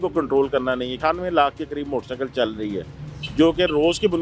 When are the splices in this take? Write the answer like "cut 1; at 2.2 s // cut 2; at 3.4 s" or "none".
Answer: cut 1; at 1.0 s